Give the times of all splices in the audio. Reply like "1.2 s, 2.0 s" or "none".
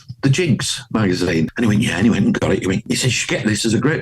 1.5 s, 2.8 s